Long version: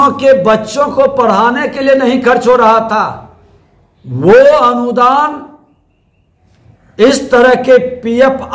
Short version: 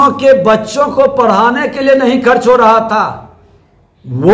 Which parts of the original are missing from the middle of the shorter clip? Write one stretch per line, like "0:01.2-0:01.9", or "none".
none